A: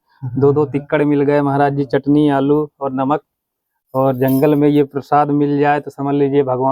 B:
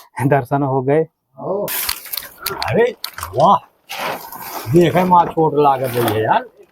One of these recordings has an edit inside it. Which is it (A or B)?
B